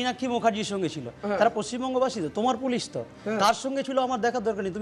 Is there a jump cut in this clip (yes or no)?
no